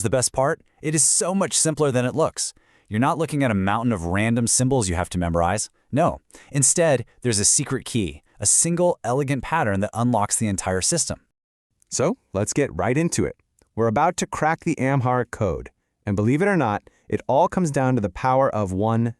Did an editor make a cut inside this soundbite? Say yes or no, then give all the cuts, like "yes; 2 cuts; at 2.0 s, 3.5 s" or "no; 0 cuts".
no; 0 cuts